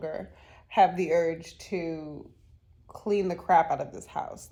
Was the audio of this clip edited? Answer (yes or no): no